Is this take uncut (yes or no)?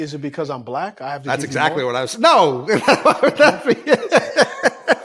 yes